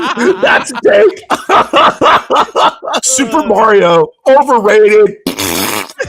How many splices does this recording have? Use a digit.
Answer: 2